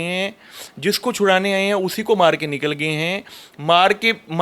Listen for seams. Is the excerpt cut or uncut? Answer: uncut